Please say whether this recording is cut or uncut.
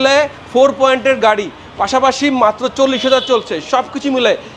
uncut